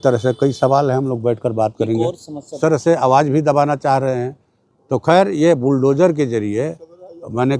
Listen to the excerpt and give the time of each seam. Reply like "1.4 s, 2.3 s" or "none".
2.6 s

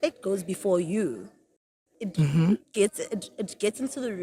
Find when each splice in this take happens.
none

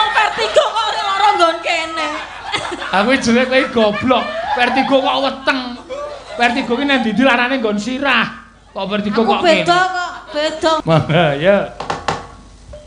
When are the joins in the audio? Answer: 10.8 s

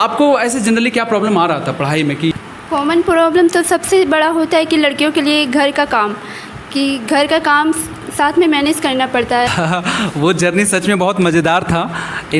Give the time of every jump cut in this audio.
2.3 s, 9.5 s

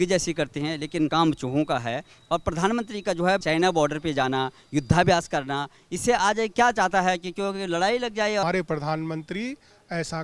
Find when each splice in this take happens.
1.1 s, 3.4 s, 8.4 s

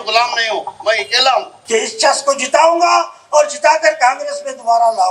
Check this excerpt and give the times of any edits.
1.6 s

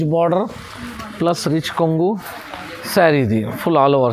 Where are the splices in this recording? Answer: none

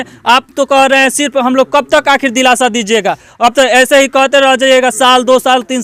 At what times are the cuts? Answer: none

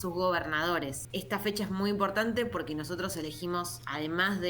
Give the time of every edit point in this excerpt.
1.0 s

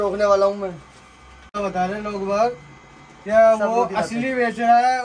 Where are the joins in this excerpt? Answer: 1.6 s

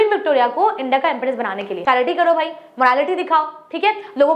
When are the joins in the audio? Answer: 1.7 s

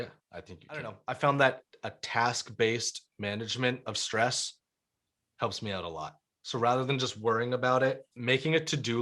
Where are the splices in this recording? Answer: 0.9 s

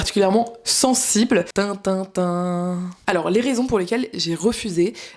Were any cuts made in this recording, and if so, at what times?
1.5 s, 2.9 s

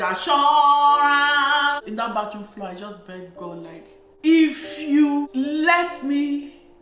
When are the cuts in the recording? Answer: 1.8 s, 4.1 s, 5.2 s

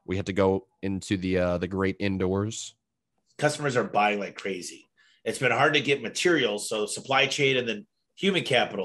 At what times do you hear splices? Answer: 3.2 s

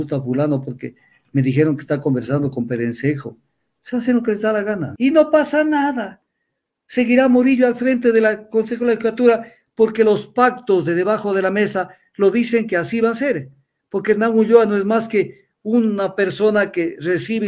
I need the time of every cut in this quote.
4.9 s

